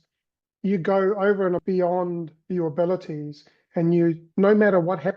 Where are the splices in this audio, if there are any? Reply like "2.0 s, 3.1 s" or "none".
1.6 s